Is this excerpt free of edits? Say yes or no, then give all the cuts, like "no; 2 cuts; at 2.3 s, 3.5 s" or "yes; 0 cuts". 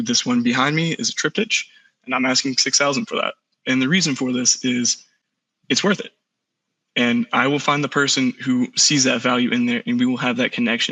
yes; 0 cuts